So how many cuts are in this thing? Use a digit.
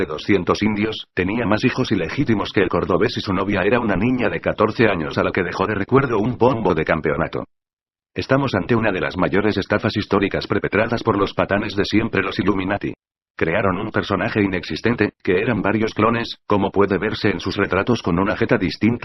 1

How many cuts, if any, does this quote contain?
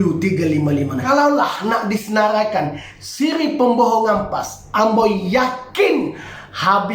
1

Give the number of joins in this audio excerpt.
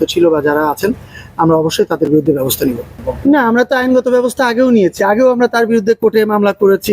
0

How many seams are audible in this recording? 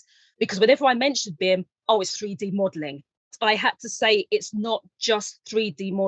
1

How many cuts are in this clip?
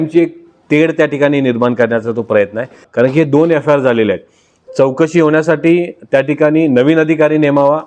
1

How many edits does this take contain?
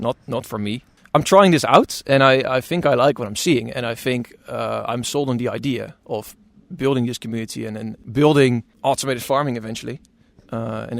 3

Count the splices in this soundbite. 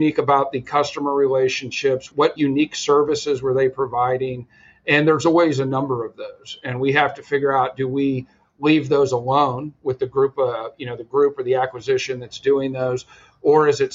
1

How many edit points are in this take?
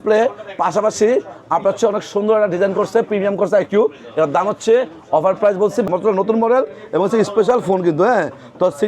1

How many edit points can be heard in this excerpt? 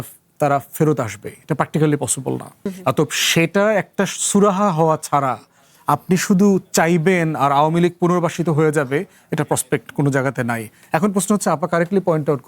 1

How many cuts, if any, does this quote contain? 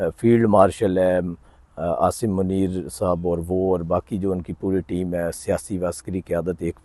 0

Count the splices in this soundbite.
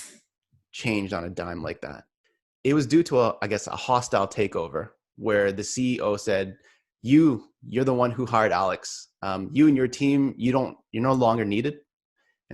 1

